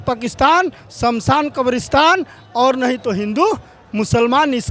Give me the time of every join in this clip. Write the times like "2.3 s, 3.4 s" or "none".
none